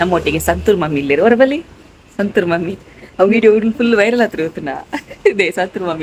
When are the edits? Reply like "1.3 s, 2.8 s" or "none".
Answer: none

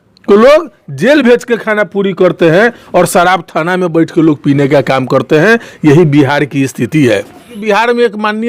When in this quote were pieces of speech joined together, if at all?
7.6 s

